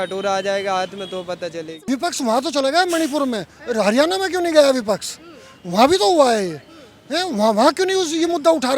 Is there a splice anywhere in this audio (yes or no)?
yes